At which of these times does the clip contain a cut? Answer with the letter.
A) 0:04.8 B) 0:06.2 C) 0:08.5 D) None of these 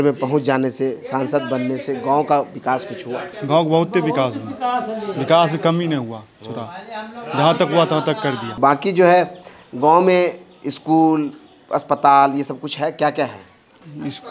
D